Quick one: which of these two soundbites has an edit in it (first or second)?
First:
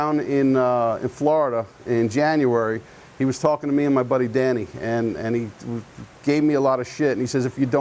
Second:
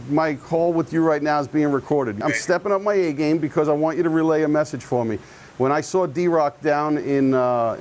second